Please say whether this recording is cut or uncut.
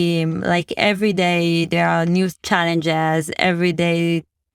uncut